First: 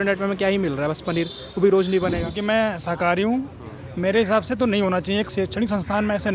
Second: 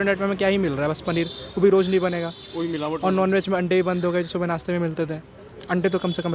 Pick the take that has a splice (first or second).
first